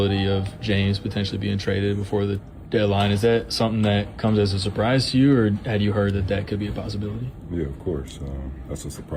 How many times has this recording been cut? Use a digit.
0